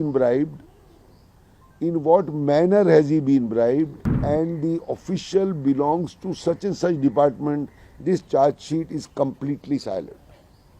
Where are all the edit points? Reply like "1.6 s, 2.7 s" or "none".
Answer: 4.1 s